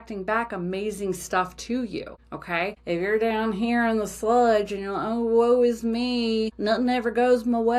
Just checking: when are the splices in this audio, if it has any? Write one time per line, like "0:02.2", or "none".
0:02.6
0:06.5